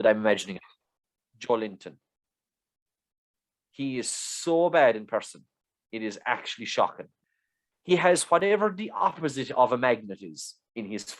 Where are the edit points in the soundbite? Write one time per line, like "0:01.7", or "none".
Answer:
0:01.1
0:07.1